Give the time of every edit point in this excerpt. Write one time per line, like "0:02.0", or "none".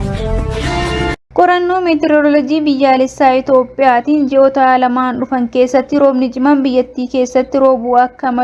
0:01.2